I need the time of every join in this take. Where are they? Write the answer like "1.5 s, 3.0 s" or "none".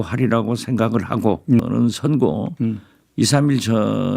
1.6 s